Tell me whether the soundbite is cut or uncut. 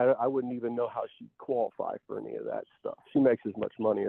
uncut